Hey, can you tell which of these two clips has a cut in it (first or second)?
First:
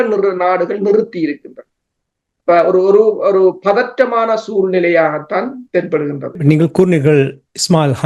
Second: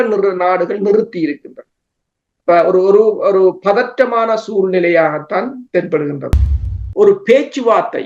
second